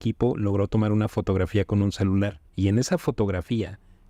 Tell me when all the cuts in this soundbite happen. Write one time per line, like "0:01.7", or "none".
0:02.4